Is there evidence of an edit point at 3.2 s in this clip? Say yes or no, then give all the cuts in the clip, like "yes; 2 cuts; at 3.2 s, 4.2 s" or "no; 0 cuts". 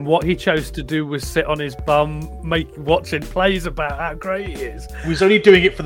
no; 1 cut; at 4.9 s